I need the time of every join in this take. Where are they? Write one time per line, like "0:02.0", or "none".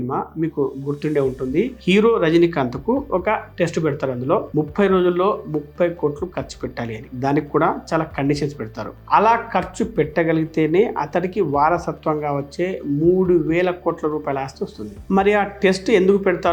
none